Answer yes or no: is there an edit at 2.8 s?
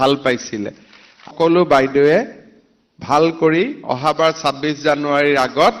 no